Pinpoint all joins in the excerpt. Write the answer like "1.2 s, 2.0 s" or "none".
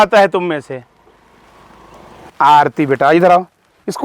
2.1 s